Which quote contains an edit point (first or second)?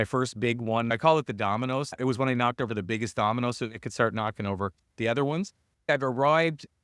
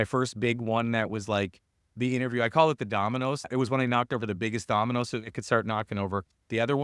first